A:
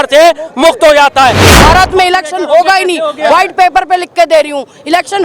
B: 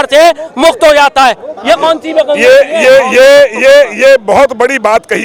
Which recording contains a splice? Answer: A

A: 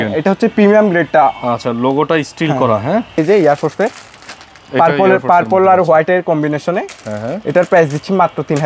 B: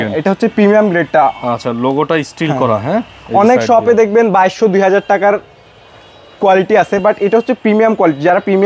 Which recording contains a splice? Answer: A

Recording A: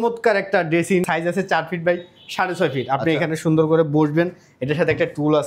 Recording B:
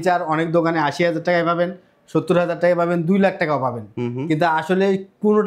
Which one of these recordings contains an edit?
A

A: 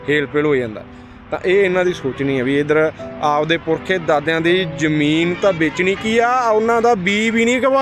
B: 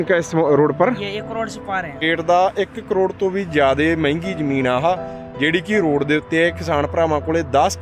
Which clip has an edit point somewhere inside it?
B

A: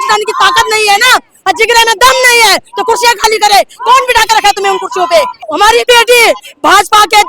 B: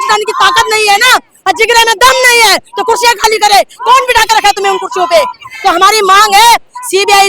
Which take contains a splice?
A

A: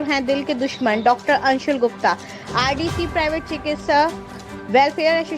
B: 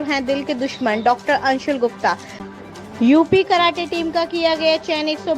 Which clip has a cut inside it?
B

